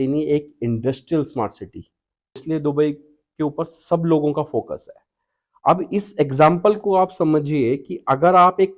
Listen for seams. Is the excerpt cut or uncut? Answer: cut